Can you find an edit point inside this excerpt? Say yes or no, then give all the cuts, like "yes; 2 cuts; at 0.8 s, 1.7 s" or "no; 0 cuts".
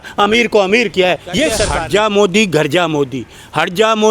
yes; 1 cut; at 1.7 s